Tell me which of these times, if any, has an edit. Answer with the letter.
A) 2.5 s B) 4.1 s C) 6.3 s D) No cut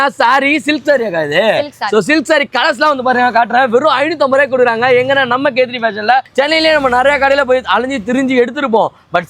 C